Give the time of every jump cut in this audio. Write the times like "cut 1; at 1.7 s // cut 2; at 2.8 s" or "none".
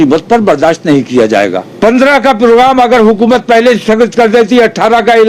cut 1; at 1.6 s